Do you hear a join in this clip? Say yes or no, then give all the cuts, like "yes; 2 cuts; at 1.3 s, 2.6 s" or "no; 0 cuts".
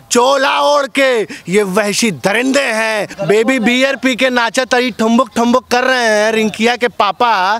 yes; 1 cut; at 3.1 s